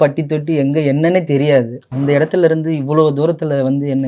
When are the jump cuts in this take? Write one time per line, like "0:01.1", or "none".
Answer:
0:01.8